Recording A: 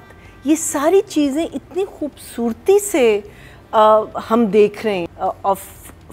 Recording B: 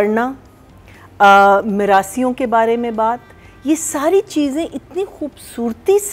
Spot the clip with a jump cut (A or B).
A